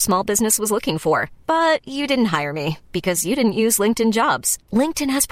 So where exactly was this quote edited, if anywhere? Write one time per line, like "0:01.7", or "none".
none

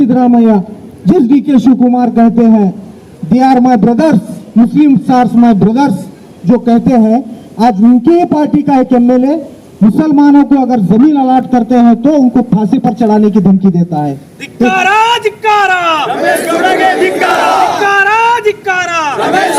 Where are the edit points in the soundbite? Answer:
none

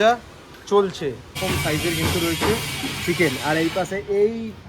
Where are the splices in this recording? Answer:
0:01.4

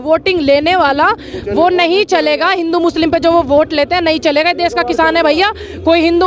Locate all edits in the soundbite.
none

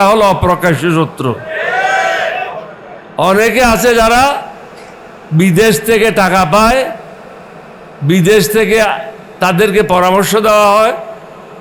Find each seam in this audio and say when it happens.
none

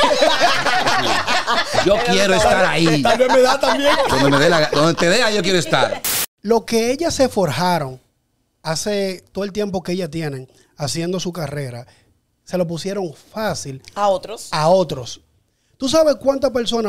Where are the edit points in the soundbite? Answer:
0:06.0

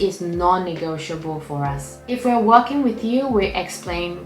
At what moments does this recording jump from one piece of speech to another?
0:01.9

